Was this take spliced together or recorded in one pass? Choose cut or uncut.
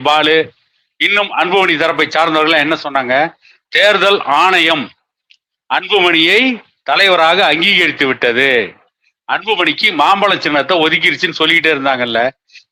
uncut